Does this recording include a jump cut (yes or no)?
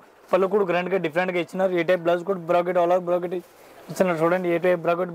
no